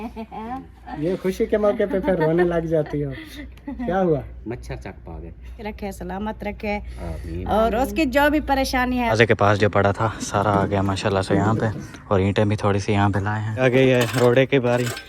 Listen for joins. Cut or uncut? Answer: cut